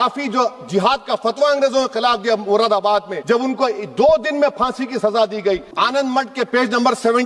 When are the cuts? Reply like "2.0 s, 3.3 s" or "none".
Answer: 3.1 s, 5.7 s